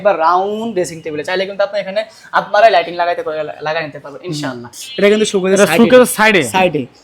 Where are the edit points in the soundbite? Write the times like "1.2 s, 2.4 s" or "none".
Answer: 4.8 s

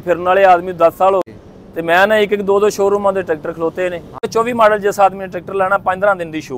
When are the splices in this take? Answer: 1.3 s, 4.3 s

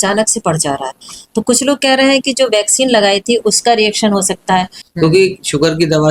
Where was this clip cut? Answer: 4.8 s

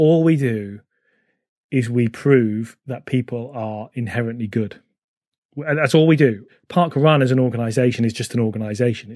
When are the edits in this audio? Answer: 6.5 s

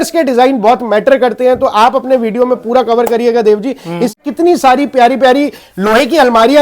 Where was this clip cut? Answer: 4.2 s

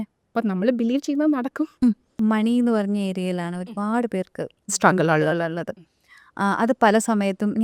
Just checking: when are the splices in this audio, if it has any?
2.1 s

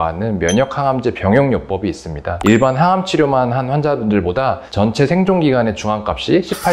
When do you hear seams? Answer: 2.4 s

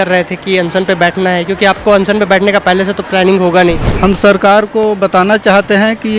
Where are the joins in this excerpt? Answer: 3.9 s

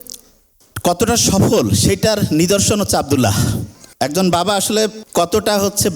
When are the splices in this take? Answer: 5.0 s

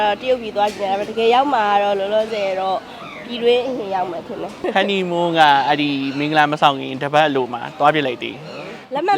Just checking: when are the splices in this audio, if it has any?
4.6 s

